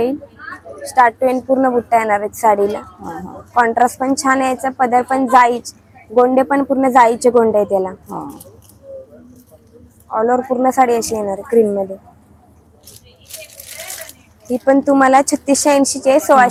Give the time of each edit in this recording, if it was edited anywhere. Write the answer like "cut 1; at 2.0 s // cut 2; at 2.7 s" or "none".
none